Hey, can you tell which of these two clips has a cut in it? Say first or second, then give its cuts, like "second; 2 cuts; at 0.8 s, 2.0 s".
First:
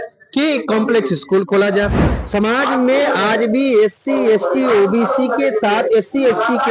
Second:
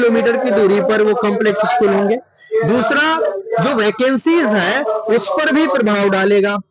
first; 1 cut; at 2.0 s